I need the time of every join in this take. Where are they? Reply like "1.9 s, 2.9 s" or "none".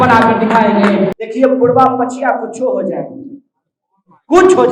1.2 s